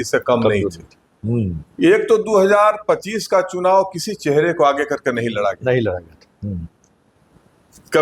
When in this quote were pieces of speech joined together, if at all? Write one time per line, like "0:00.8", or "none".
0:01.6